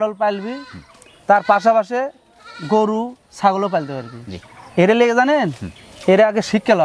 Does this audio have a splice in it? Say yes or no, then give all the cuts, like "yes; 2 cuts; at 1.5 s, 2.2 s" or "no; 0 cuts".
no; 0 cuts